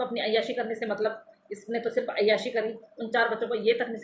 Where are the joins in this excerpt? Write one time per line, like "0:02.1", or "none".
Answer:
none

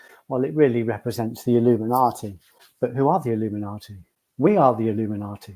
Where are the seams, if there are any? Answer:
none

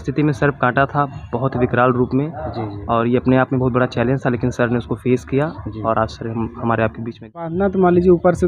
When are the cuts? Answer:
0:07.5

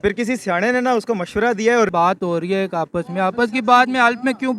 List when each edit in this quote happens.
0:01.9

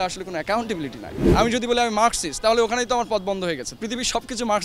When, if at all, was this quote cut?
0:01.1
0:03.7

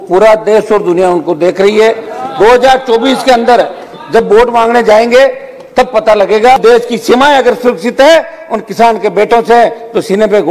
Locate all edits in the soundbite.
0:06.6

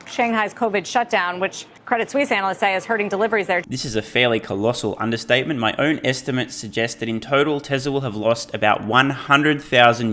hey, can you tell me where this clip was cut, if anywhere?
none

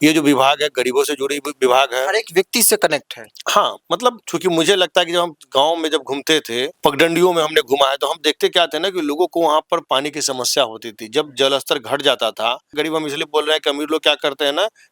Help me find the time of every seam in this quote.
0:04.3
0:06.7
0:12.7

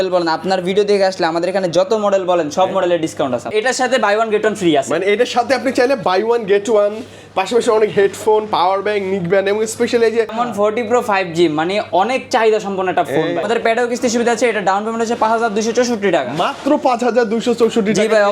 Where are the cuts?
0:03.5
0:10.4
0:13.4

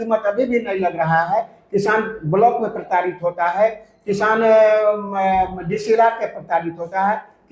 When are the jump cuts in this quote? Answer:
none

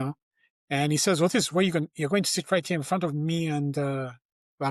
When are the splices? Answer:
none

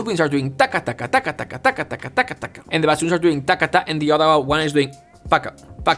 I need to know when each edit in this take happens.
none

